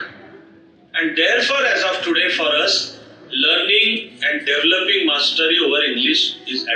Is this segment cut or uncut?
uncut